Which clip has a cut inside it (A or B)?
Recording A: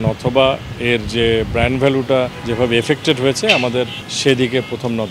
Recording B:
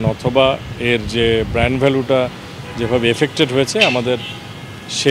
A